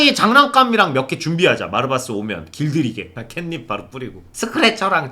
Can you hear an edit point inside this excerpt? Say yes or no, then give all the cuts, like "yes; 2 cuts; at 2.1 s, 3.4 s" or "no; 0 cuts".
yes; 2 cuts; at 3.2 s, 4.2 s